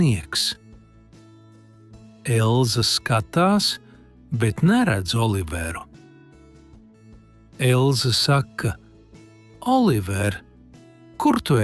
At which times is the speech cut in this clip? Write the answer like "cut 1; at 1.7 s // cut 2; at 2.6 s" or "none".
none